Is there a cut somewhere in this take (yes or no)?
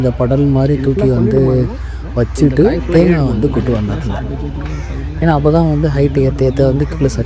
no